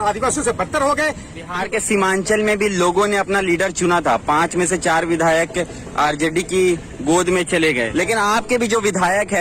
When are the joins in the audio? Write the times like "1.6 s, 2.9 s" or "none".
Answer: 1.6 s, 7.8 s